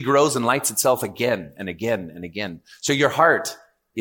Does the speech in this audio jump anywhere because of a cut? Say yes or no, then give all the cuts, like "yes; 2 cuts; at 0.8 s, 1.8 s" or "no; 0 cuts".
no; 0 cuts